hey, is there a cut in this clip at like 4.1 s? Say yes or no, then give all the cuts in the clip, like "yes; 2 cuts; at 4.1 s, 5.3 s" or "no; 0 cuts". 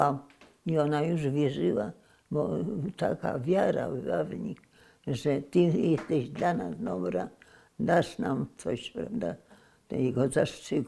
no; 0 cuts